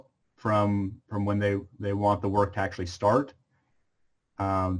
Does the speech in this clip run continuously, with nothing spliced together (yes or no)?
yes